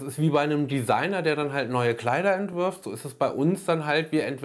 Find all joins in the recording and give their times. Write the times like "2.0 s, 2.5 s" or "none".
none

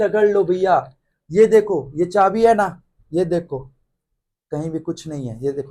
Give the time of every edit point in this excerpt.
none

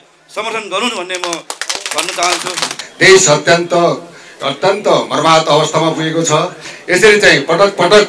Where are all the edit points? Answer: 6.7 s

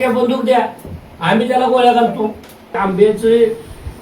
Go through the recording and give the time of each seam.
2.8 s

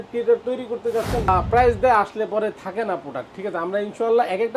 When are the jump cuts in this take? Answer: 1.3 s

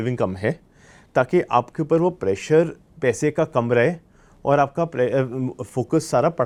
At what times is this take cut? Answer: none

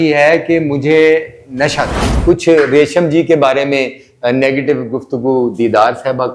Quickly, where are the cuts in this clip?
2.0 s

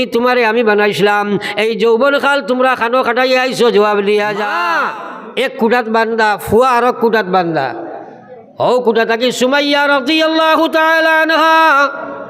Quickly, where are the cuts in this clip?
4.6 s

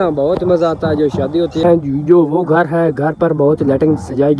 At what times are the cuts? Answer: 1.6 s

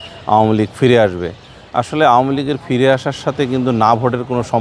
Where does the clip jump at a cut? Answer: none

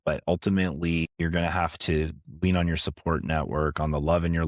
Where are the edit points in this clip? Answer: 1.1 s

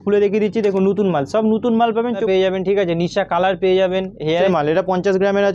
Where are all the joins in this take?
2.2 s, 4.5 s

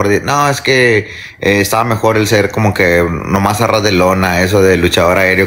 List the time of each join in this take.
none

